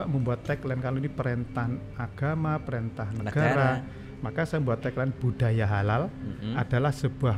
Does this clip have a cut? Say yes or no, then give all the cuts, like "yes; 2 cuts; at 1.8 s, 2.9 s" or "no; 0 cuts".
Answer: no; 0 cuts